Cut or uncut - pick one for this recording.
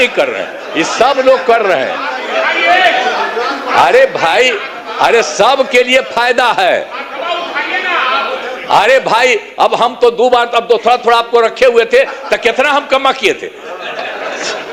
uncut